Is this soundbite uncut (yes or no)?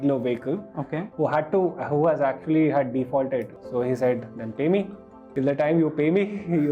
no